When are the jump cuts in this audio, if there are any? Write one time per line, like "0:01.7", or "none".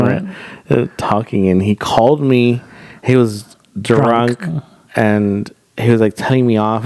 none